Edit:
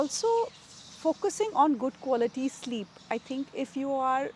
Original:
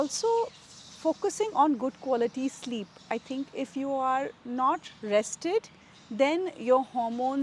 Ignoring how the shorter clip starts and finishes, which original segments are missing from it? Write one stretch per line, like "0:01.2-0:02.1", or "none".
none